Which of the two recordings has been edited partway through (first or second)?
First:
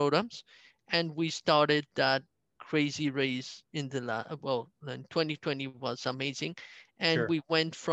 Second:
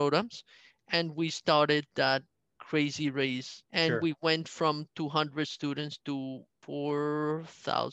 second